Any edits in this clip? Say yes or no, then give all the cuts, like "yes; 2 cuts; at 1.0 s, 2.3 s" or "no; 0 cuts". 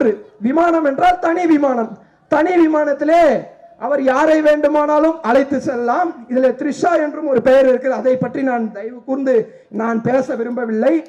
no; 0 cuts